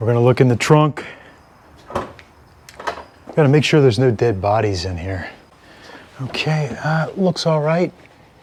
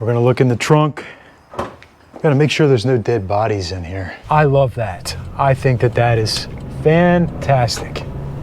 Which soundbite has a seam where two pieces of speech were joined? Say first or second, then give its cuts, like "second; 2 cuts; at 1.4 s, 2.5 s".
second; 2 cuts; at 1.9 s, 4.1 s